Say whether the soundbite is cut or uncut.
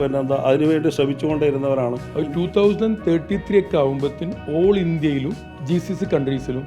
cut